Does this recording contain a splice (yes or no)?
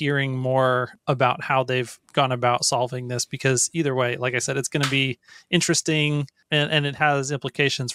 yes